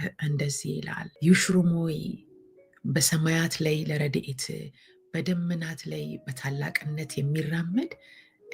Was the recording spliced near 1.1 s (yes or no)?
yes